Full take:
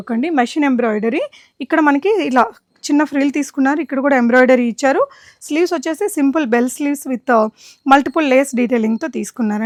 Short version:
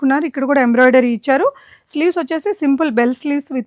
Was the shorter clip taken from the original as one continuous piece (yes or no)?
yes